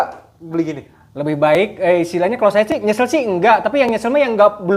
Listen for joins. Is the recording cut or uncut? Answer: uncut